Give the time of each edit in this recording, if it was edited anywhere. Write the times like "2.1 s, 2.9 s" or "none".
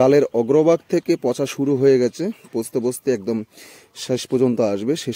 none